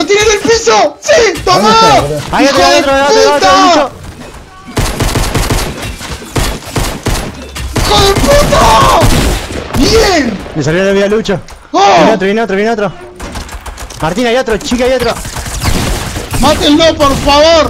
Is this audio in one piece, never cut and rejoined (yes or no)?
yes